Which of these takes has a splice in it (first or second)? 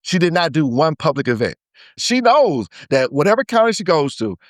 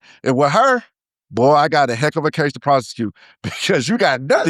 first